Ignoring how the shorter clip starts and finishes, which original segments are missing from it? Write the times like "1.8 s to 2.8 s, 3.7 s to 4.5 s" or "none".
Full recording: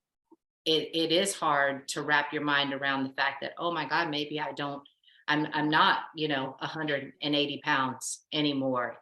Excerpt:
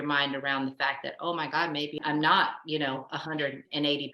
4.4 s to 5.5 s

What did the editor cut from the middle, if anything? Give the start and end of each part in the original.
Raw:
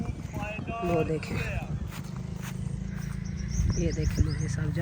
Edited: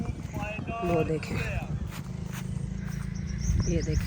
2.1 s to 2.2 s

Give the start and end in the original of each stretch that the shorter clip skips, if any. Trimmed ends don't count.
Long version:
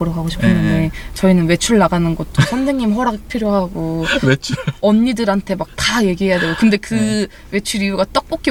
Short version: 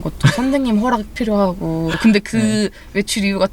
4.1 s to 6.5 s

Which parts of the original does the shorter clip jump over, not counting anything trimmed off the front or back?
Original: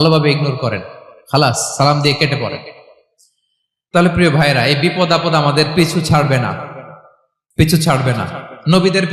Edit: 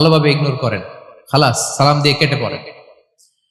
none

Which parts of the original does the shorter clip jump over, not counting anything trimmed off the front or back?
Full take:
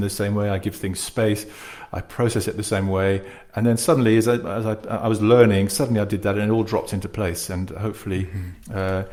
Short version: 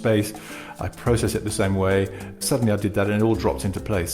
3.5 s to 5.7 s

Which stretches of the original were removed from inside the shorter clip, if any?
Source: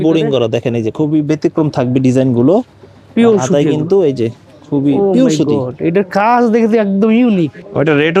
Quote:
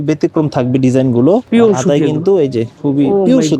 2.7 s to 3.1 s, 4.3 s to 4.6 s

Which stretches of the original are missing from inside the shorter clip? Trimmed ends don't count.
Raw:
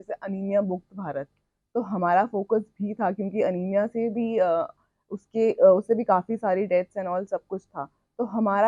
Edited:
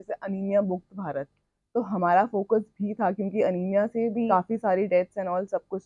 4.3 s to 6.1 s

